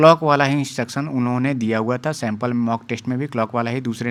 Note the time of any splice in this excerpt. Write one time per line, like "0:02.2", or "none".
none